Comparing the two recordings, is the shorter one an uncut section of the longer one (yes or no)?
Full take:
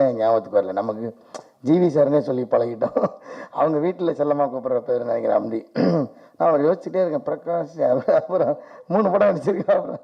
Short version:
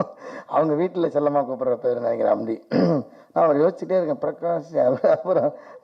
yes